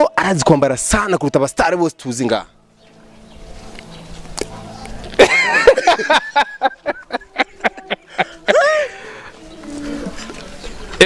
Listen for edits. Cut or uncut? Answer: uncut